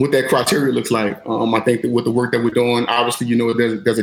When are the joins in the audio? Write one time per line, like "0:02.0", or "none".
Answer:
none